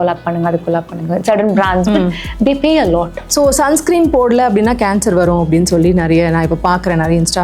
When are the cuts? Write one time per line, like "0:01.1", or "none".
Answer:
0:03.2